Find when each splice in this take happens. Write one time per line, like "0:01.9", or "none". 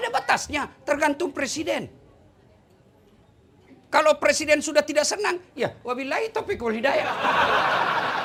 none